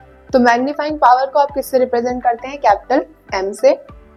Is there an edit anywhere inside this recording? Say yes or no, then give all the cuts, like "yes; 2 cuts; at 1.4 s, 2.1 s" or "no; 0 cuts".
no; 0 cuts